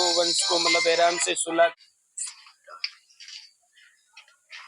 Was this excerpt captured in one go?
no; 1 cut; at 1.7 s

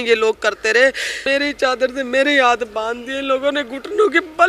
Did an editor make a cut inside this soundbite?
yes; 1 cut; at 1.2 s

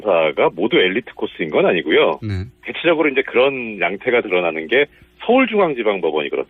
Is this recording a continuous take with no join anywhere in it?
no; 1 cut; at 3.6 s

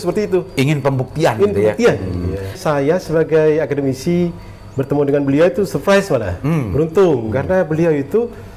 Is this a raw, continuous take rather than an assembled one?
no; 1 cut; at 2.6 s

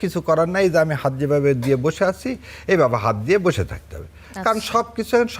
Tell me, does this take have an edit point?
no; 0 cuts

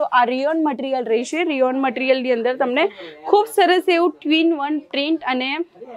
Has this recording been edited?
no; 0 cuts

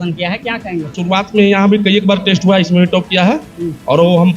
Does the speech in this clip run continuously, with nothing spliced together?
no; 1 cut; at 0.9 s

